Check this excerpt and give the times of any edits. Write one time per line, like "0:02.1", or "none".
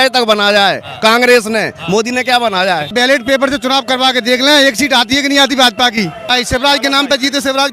0:02.9
0:06.3